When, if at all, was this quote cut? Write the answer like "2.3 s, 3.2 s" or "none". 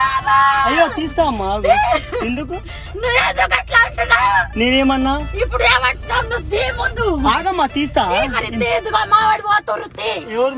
1.0 s